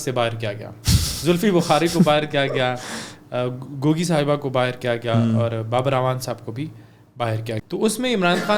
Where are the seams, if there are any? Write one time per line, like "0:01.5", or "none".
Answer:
0:07.6

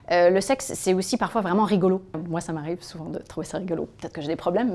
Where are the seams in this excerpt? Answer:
0:02.2

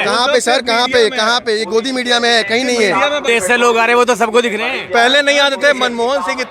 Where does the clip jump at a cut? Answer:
0:03.2

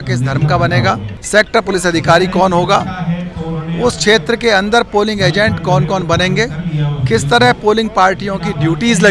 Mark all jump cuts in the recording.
0:01.1

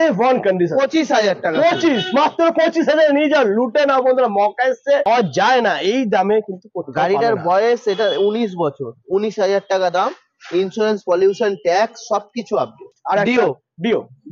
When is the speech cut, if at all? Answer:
0:05.1
0:13.0

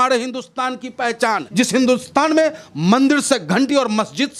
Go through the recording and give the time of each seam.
0:01.4

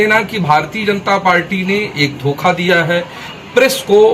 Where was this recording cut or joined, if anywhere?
none

